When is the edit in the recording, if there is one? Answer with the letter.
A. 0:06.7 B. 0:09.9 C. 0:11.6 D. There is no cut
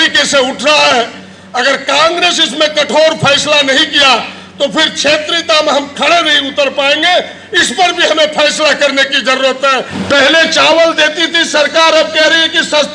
B